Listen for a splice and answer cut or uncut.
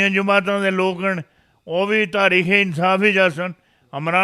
uncut